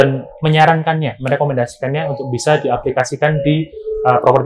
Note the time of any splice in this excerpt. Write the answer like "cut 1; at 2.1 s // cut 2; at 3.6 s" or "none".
none